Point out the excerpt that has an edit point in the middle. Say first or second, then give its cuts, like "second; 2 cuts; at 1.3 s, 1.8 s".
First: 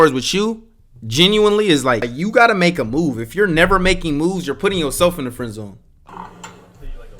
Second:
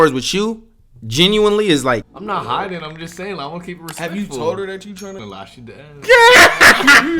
second; 2 cuts; at 2.1 s, 5.3 s